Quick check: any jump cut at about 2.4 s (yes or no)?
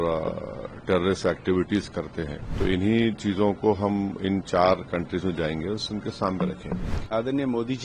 yes